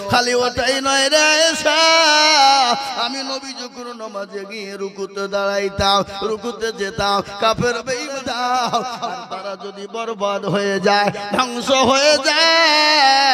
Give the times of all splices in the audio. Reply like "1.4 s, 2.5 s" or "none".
8.2 s

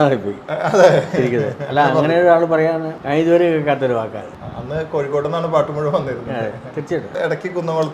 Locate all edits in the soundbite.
2.9 s, 4.4 s, 7.1 s

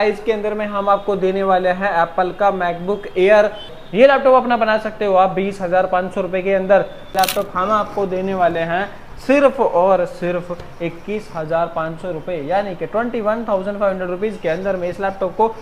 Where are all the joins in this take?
3.7 s, 7.1 s

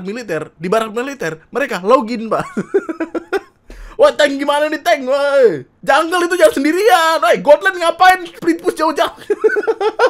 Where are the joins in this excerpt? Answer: 5.7 s, 8.3 s

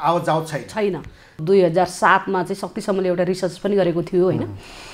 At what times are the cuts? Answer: 1.4 s

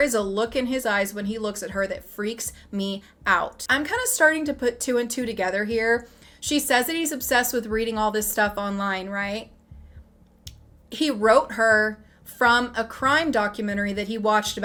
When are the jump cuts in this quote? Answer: none

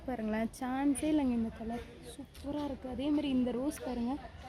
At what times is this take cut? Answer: none

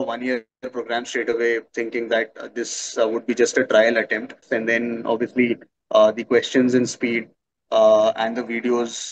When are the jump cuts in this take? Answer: 4.5 s

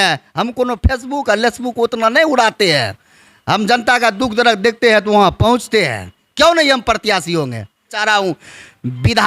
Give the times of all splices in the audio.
7.9 s

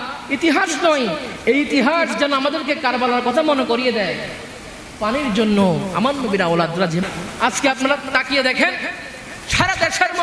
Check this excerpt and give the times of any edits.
7.0 s

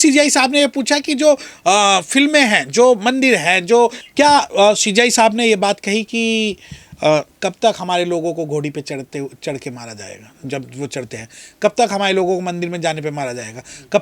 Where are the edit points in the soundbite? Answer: 4.0 s

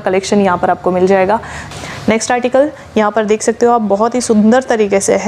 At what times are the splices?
1.7 s

